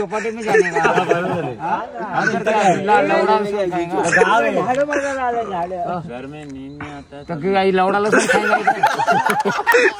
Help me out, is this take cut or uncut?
uncut